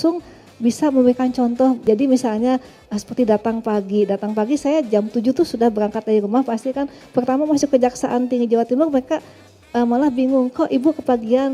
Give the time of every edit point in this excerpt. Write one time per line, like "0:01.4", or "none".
0:01.8